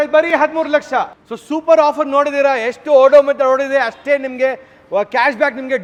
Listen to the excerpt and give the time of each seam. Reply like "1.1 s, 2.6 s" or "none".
none